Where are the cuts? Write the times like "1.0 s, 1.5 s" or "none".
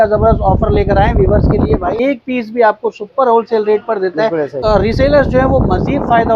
2.0 s, 4.6 s

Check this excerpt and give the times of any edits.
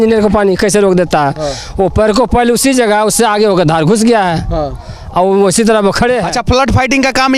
6.3 s

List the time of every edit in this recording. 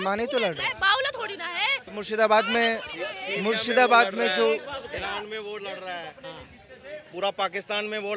none

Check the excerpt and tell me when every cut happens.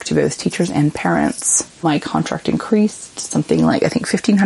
1.8 s

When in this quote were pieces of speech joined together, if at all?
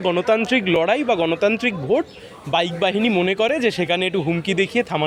none

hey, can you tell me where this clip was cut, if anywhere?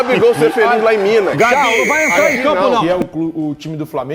2.8 s

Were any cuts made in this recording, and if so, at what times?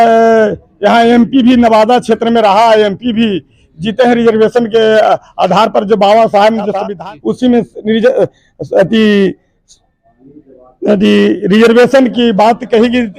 6.8 s

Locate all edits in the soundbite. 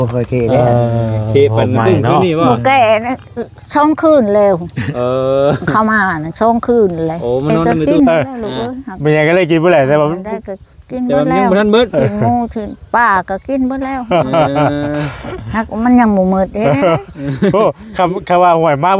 7.7 s

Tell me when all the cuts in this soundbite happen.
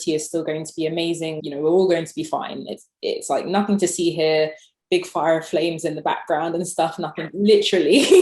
1.4 s

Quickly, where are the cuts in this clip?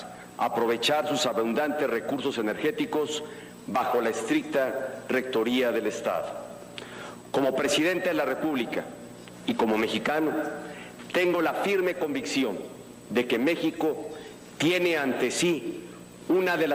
1.5 s

